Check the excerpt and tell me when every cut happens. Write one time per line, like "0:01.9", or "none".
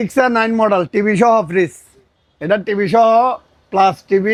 none